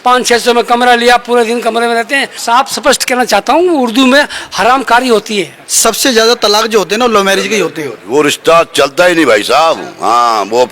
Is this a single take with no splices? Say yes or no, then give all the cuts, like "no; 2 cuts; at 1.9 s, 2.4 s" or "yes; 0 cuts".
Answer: no; 3 cuts; at 2.4 s, 5.6 s, 8.0 s